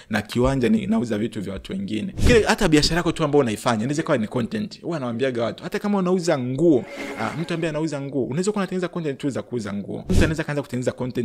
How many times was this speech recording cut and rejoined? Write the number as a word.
two